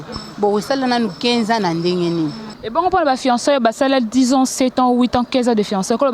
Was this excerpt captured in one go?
no; 1 cut; at 2.6 s

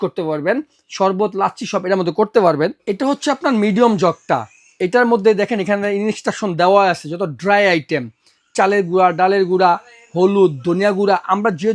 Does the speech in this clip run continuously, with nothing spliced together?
yes; 0 cuts

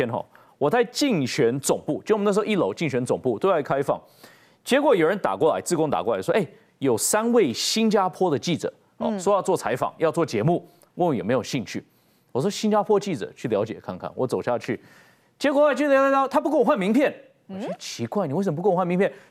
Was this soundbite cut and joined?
no; 0 cuts

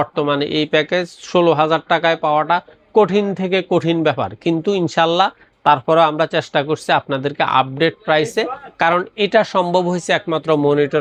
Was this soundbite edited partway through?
no; 0 cuts

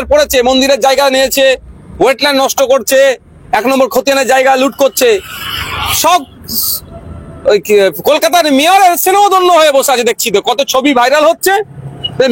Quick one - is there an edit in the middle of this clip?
no; 0 cuts

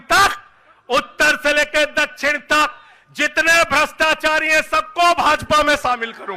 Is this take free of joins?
yes; 0 cuts

